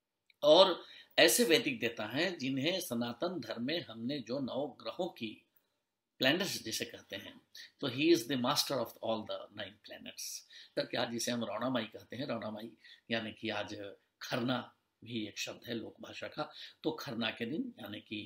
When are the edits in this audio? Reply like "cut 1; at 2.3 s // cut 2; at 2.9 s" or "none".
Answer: cut 1; at 10.6 s

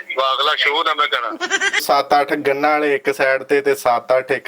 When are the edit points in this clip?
cut 1; at 1.6 s

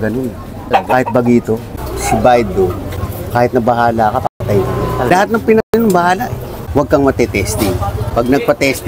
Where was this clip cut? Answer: cut 1; at 1.6 s // cut 2; at 6.5 s

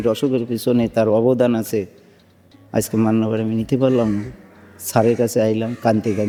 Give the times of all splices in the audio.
none

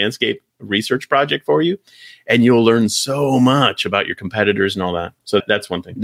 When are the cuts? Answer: none

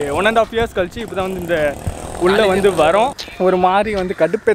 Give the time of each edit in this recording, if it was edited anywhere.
cut 1; at 3.1 s

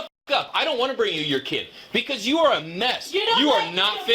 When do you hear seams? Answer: none

